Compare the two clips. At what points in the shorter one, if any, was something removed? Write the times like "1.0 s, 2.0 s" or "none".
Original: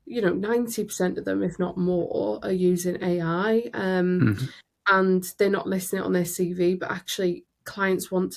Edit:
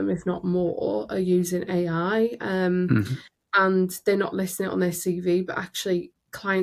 none